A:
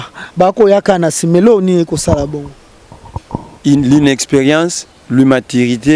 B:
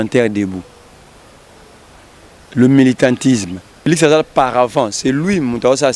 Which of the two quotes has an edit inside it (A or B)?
B